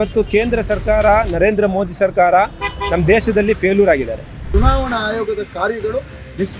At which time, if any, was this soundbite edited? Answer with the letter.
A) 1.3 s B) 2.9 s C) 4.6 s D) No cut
C